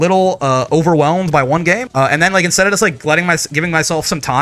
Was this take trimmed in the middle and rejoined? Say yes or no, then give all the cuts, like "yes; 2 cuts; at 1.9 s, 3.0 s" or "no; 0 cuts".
yes; 1 cut; at 1.8 s